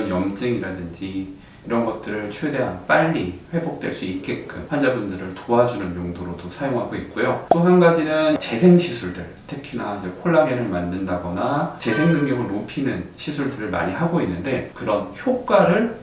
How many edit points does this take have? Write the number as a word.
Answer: three